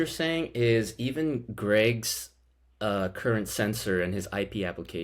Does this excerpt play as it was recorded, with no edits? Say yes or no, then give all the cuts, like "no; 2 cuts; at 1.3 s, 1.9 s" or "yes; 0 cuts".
yes; 0 cuts